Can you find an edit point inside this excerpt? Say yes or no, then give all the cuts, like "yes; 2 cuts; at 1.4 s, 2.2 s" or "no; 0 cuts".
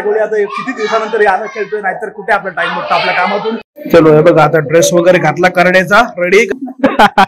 yes; 2 cuts; at 3.7 s, 6.5 s